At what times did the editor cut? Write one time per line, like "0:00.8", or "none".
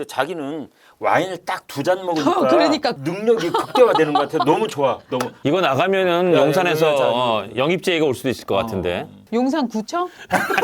0:05.3
0:09.1